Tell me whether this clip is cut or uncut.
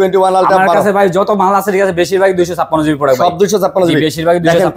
uncut